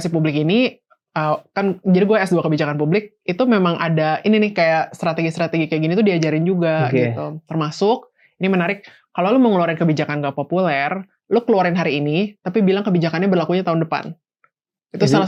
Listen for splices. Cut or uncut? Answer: uncut